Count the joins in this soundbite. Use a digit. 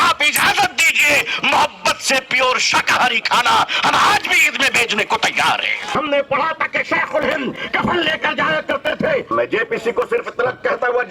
2